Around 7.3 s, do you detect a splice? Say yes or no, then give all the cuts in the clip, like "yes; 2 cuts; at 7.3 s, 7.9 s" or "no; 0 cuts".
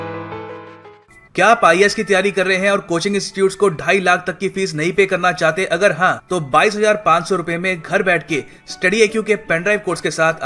no; 1 cut; at 1.0 s